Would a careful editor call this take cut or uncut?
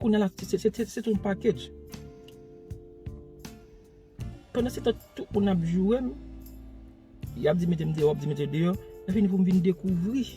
uncut